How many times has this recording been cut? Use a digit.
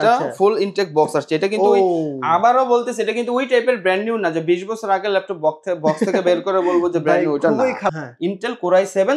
1